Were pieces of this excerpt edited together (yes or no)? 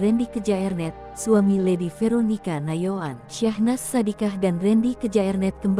no